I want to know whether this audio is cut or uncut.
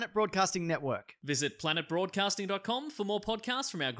uncut